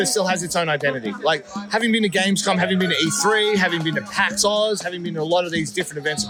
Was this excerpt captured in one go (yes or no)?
yes